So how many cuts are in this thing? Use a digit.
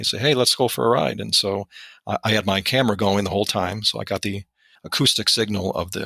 1